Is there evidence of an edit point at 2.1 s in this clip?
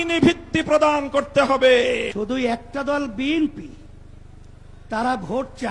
yes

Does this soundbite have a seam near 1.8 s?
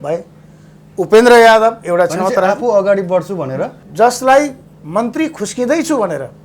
no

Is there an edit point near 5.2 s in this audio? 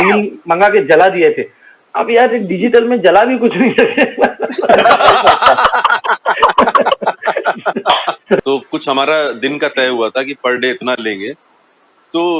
no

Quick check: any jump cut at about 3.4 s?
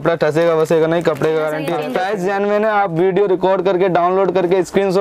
no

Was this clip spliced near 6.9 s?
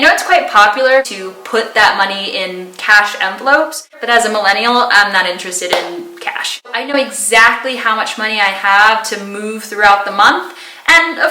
yes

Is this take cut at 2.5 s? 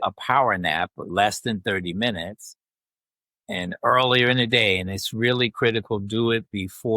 no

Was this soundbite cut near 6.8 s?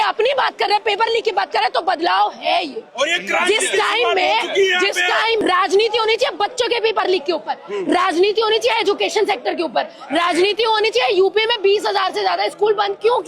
no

